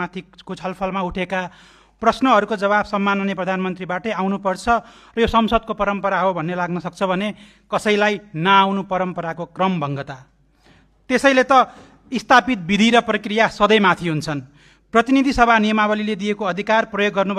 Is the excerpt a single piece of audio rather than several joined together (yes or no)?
yes